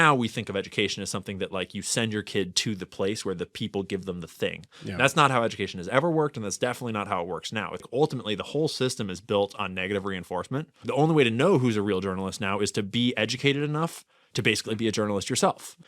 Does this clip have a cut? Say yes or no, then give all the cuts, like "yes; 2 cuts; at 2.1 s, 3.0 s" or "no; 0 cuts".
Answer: yes; 2 cuts; at 7.8 s, 10.9 s